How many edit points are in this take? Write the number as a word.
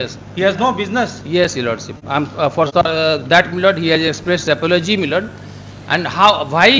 zero